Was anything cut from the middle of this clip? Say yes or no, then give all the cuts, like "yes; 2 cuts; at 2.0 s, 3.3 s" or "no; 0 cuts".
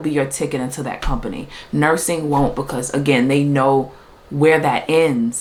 no; 0 cuts